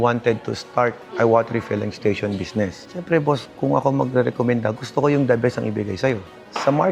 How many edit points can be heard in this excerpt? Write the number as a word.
zero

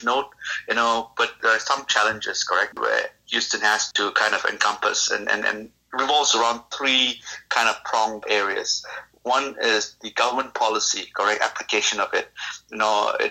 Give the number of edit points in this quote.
five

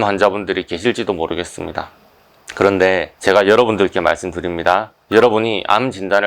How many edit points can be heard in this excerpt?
zero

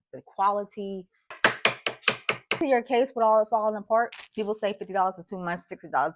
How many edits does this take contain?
three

